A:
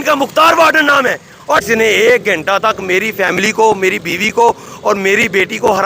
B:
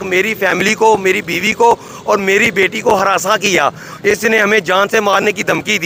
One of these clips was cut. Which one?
A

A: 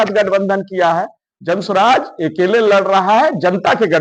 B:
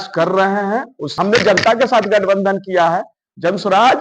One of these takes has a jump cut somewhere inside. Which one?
B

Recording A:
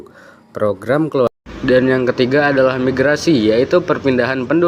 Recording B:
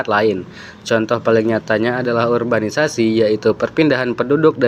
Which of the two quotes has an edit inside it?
A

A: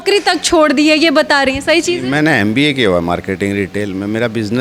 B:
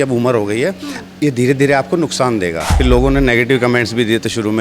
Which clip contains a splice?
B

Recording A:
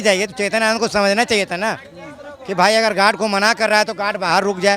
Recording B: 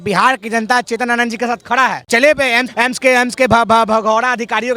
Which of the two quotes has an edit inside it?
B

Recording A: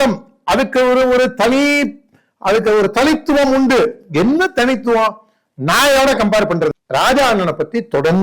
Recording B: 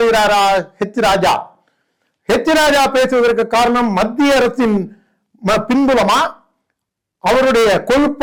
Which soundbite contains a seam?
A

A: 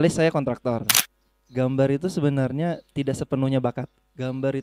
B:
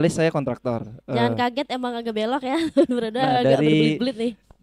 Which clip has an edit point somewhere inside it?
A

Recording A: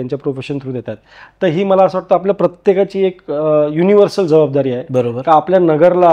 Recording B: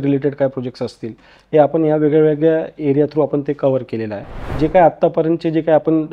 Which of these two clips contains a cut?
B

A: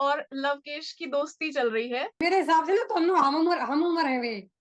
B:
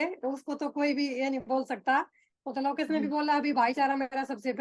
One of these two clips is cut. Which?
A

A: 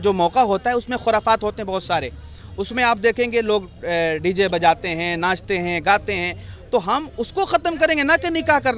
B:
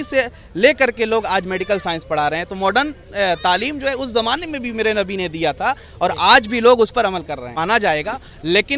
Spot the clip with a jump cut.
B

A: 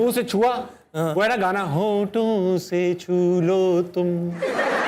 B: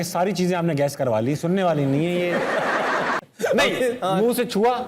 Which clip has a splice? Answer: B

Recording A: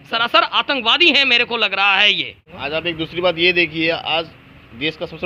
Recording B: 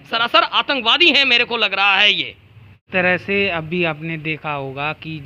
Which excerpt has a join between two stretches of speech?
A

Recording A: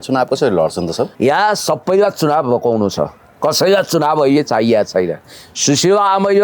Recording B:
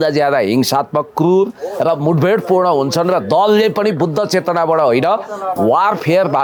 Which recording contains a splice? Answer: A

